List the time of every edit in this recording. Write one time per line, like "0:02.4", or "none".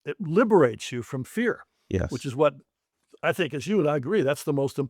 none